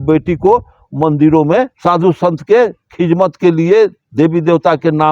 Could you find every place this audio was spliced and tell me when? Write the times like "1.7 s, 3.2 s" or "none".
1.7 s